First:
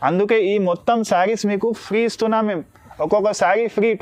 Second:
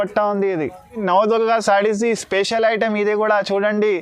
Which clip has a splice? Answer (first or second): second